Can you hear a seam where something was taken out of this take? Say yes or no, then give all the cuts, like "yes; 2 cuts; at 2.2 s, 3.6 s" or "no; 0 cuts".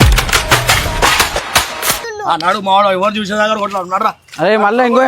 yes; 1 cut; at 2.0 s